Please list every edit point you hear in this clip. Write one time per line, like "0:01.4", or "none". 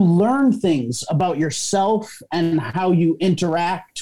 none